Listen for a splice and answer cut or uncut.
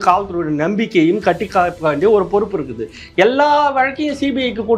uncut